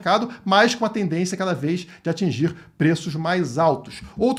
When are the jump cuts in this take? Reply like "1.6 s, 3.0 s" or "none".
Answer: none